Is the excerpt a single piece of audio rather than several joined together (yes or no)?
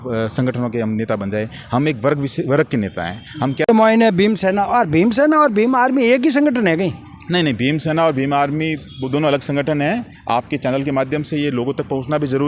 no